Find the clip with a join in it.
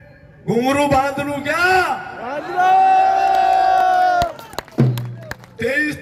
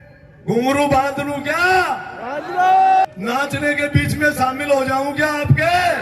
second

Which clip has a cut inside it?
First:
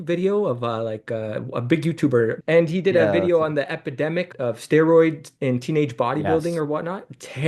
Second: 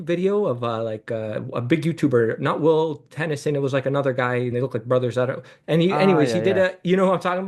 first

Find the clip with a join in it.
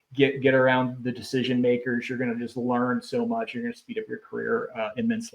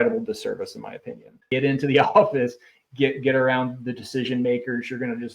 second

